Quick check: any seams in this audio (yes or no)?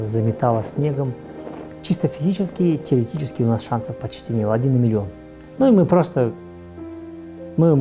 yes